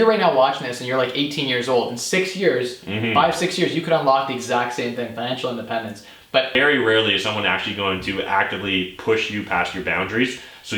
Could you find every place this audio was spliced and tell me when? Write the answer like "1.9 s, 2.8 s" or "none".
6.5 s